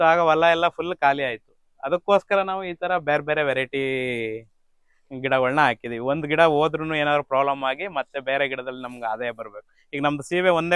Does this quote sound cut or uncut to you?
uncut